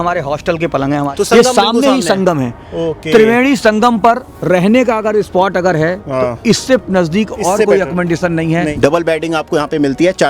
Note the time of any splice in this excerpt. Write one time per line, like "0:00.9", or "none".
0:01.1
0:08.7